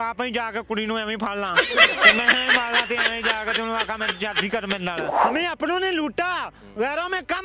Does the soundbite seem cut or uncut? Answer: cut